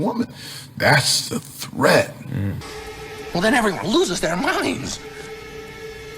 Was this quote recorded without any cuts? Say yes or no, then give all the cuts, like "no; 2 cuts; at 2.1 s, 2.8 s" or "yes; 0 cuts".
yes; 0 cuts